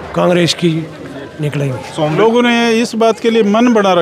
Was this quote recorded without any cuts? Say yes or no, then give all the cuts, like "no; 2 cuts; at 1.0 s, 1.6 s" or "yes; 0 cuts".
no; 1 cut; at 2.1 s